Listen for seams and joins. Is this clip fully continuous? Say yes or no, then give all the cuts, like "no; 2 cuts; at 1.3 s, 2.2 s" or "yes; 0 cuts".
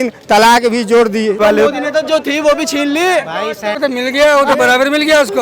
no; 2 cuts; at 1.4 s, 3.8 s